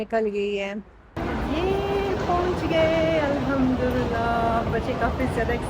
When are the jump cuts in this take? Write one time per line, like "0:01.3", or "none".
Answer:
0:01.0